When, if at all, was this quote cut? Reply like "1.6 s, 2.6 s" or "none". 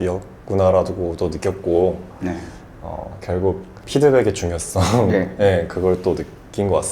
3.8 s